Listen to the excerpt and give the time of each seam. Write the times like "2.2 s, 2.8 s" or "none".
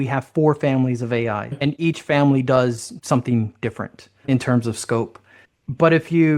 1.5 s, 4.2 s